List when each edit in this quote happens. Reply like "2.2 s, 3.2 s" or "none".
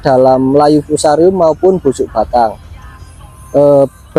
none